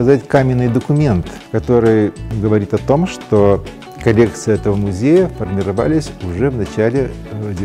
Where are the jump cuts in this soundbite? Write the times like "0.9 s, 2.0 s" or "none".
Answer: 1.4 s, 2.3 s